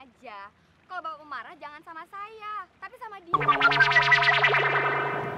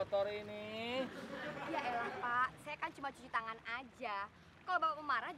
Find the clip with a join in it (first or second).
first